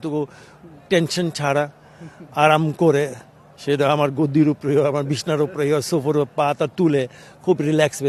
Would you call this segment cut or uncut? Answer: uncut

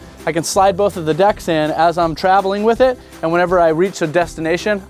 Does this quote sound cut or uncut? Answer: uncut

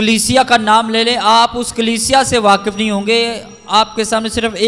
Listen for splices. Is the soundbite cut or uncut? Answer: uncut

